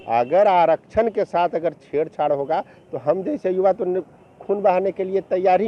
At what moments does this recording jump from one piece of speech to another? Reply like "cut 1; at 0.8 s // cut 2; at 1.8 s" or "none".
none